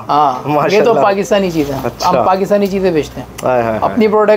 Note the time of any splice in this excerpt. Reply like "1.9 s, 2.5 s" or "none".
none